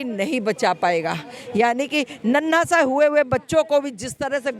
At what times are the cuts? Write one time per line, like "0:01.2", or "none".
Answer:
none